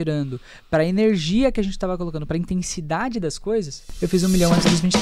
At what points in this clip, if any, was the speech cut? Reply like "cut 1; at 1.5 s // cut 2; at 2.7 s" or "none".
cut 1; at 3.8 s